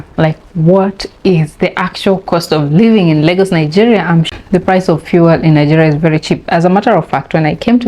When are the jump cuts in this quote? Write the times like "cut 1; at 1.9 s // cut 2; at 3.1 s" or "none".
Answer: cut 1; at 4.3 s